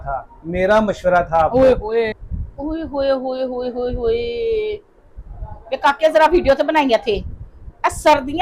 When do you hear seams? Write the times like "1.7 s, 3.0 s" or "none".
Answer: 2.1 s